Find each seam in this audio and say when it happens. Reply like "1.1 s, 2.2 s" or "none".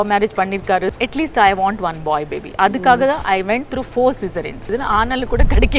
0.9 s, 4.7 s